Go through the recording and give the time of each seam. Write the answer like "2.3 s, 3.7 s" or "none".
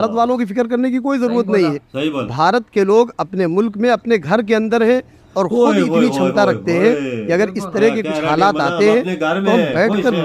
none

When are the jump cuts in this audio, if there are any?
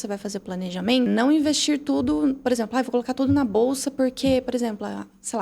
1.1 s

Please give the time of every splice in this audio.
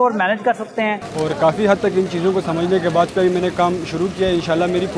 1.0 s, 3.1 s

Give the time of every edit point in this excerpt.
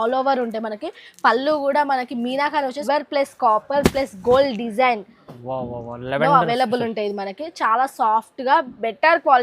2.8 s

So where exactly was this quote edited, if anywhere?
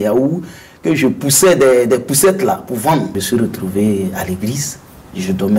3.1 s

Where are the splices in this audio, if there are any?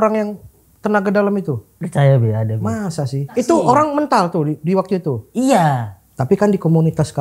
1.7 s, 3.3 s

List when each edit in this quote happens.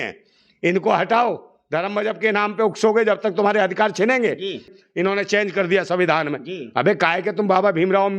4.7 s

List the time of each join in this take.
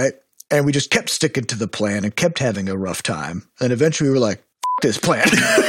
4.8 s

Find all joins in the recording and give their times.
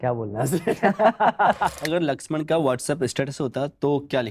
1.8 s

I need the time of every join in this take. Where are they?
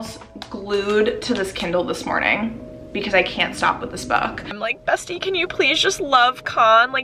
4.6 s

